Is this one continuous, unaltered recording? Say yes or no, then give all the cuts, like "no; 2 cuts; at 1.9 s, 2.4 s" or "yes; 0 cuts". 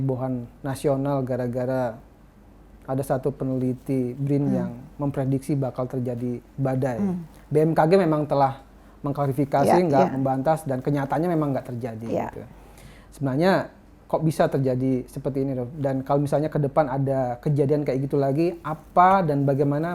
yes; 0 cuts